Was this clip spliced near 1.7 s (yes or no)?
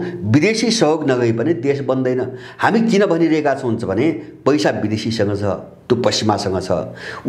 no